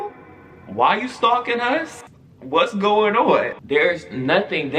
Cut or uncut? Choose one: cut